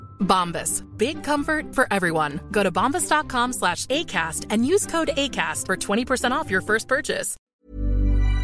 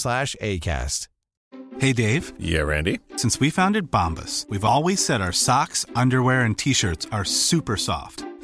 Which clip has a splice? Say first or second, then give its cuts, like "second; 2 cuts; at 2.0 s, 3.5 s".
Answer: first; 1 cut; at 7.5 s